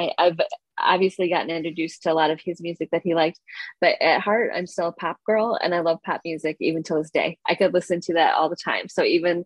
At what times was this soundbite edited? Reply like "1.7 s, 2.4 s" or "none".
none